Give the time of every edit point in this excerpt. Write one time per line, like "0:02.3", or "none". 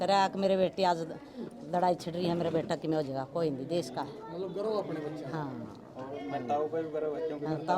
none